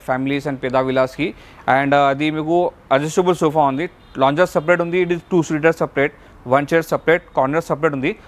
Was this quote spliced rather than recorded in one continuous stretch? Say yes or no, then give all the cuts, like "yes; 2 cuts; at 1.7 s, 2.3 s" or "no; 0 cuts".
no; 0 cuts